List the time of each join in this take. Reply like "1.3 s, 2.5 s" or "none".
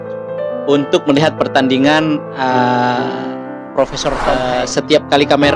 4.3 s